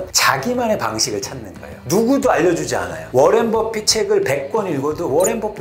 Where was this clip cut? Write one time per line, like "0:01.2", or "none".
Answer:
none